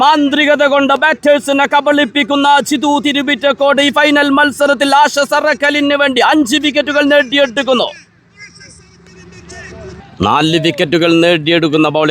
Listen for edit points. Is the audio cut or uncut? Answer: cut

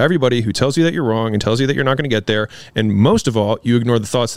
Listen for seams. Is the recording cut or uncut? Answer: uncut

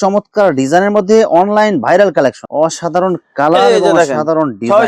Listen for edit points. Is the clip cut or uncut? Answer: cut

